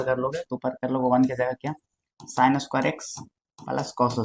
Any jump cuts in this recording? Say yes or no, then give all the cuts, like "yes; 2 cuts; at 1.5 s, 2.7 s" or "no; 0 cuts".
no; 0 cuts